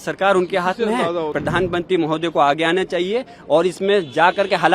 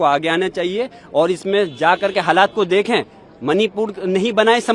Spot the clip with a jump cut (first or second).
first